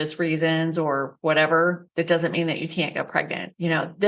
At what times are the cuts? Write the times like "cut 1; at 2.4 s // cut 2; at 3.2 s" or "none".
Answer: cut 1; at 1.1 s // cut 2; at 1.8 s // cut 3; at 3.2 s